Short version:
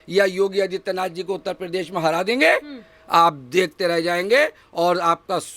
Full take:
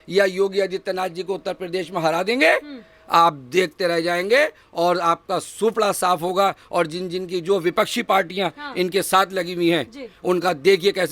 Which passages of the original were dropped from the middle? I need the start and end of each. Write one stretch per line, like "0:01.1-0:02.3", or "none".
none